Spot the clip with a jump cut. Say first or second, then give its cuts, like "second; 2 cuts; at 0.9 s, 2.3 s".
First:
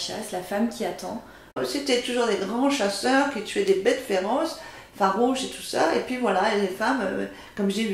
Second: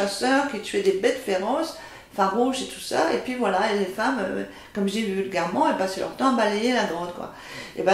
first; 1 cut; at 1.5 s